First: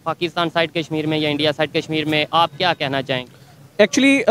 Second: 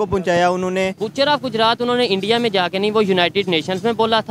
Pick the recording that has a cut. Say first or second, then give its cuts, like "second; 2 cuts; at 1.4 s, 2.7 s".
second; 1 cut; at 1.0 s